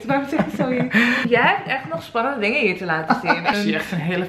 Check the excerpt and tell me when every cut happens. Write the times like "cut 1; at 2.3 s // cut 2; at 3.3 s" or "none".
cut 1; at 1.2 s // cut 2; at 3.5 s